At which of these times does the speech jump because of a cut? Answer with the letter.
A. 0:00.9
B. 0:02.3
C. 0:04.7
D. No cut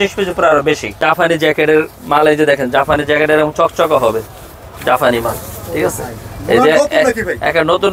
A